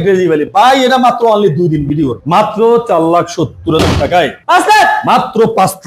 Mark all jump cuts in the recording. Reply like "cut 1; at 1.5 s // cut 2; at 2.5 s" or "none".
cut 1; at 2.2 s // cut 2; at 4.4 s